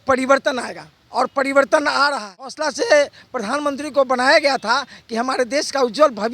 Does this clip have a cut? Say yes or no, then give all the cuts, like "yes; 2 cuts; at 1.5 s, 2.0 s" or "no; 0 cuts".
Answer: yes; 1 cut; at 2.6 s